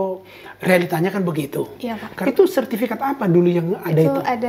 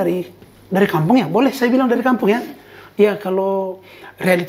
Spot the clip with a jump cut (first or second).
first